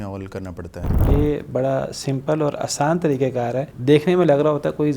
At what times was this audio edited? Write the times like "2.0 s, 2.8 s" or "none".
0.9 s, 3.7 s

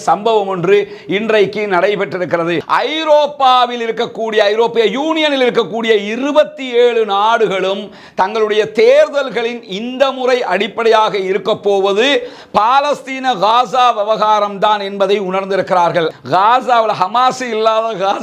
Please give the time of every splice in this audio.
2.6 s, 16.1 s

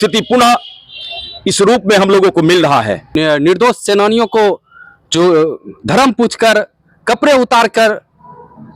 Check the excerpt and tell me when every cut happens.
3.2 s

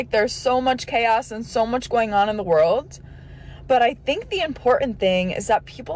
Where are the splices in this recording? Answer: none

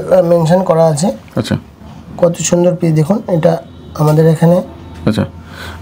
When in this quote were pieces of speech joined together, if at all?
none

